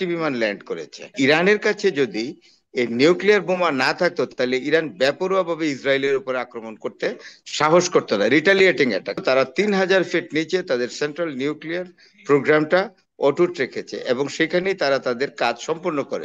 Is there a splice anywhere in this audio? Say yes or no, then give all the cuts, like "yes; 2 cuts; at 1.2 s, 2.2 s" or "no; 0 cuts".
yes; 2 cuts; at 1.1 s, 9.2 s